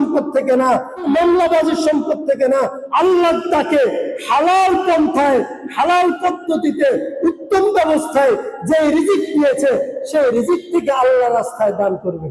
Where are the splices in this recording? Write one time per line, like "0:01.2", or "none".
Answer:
0:01.0
0:02.8